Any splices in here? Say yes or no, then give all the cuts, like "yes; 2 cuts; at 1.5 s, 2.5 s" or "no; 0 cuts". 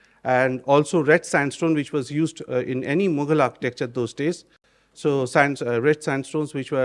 no; 0 cuts